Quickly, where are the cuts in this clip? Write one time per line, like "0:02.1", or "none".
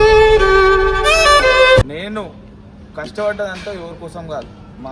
0:01.8